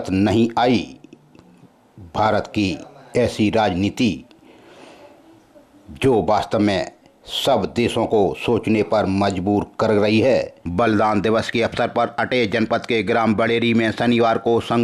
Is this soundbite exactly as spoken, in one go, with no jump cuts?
no; 1 cut; at 10.6 s

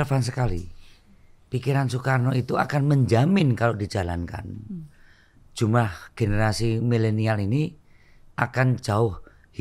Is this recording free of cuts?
yes; 0 cuts

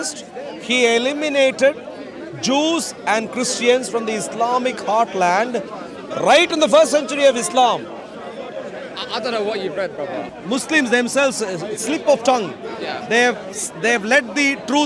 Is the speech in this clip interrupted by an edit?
yes; 1 cut; at 10.3 s

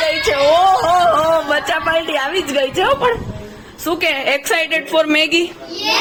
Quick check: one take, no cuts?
yes; 0 cuts

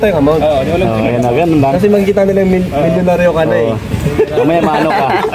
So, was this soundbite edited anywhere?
no; 0 cuts

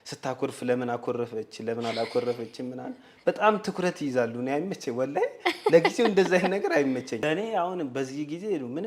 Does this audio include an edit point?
yes; 1 cut; at 7.2 s

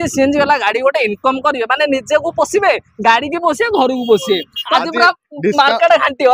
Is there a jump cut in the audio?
yes; 1 cut; at 4.6 s

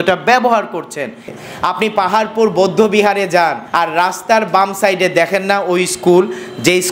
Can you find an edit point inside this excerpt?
yes; 2 cuts; at 1.3 s, 3.6 s

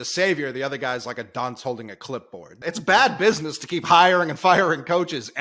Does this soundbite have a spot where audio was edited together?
yes; 1 cut; at 2.4 s

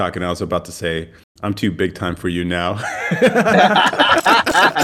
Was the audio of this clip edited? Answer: no; 0 cuts

